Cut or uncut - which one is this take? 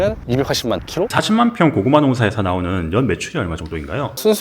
cut